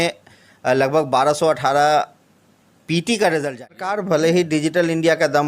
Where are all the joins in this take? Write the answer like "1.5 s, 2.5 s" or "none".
3.9 s